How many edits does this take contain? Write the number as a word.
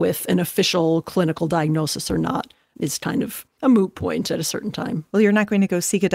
two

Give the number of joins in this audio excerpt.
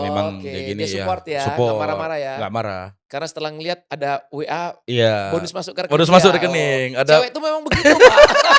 zero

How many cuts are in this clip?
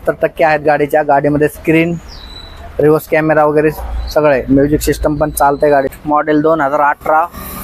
one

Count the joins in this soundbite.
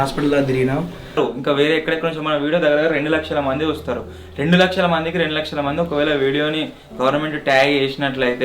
one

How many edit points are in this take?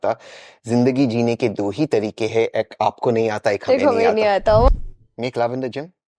one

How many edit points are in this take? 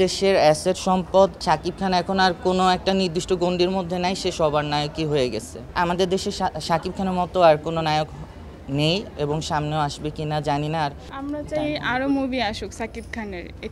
three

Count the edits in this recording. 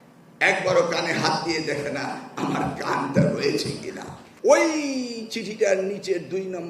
one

